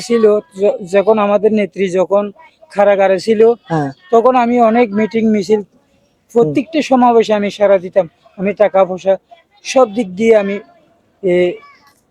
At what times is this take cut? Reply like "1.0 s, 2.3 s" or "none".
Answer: none